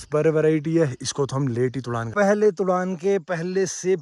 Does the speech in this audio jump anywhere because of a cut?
yes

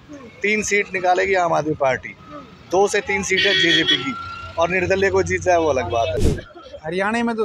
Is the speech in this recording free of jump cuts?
no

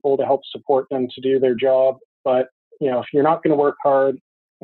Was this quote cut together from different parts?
no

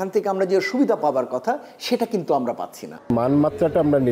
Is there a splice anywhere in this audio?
yes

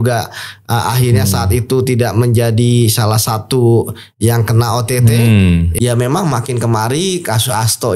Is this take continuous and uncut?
no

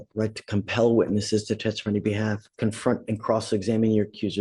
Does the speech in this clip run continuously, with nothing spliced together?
yes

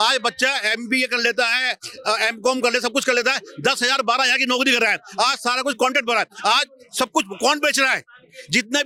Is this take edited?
no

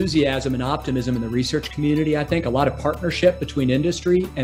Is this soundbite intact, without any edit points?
yes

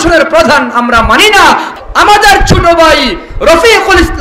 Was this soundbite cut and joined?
yes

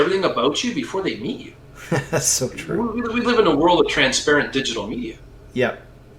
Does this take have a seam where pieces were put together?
no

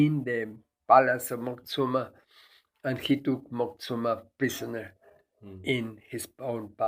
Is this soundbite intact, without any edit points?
yes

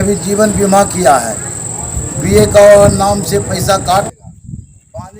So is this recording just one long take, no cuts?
no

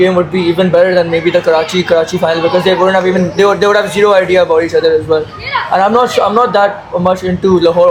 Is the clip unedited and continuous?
yes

